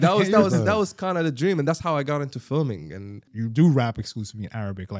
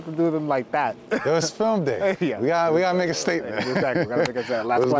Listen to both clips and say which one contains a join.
first; 1 cut; at 3.3 s

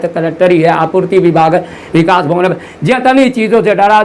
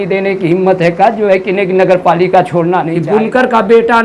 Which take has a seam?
second; 1 cut; at 3.0 s

